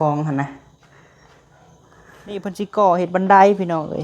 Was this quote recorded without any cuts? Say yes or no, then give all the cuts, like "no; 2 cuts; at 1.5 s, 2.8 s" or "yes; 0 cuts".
no; 1 cut; at 2.6 s